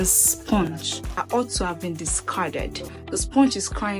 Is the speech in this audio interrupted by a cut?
yes; 1 cut; at 2.8 s

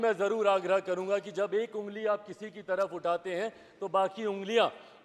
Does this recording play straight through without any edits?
yes; 0 cuts

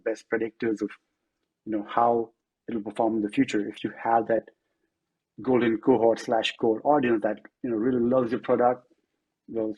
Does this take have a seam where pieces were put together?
no; 0 cuts

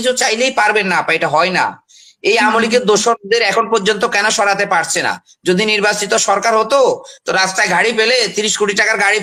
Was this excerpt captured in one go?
yes; 0 cuts

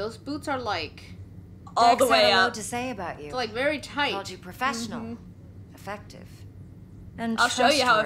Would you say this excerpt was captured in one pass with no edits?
yes; 0 cuts

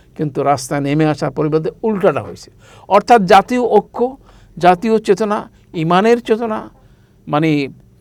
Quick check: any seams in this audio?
no; 0 cuts

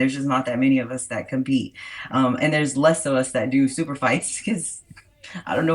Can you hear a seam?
no; 0 cuts

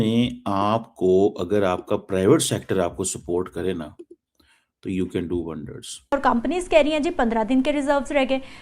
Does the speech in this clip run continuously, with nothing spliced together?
no; 1 cut; at 6.1 s

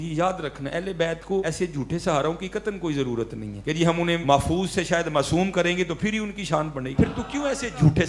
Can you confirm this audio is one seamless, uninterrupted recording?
no; 4 cuts; at 1.4 s, 3.5 s, 4.2 s, 6.9 s

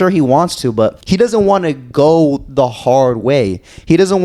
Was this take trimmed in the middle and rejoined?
yes; 1 cut; at 1.0 s

